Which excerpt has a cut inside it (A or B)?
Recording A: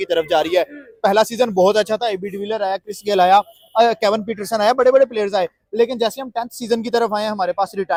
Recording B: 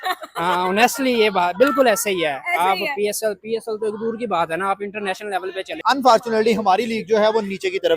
B